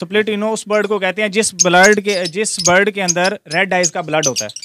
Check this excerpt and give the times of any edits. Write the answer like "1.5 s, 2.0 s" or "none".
none